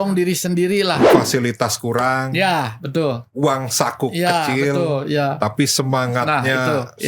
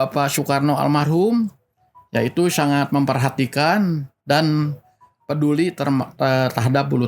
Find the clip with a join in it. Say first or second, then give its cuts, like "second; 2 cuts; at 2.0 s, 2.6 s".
first; 1 cut; at 1.1 s